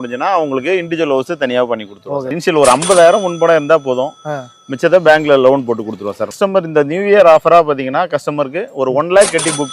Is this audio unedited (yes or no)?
no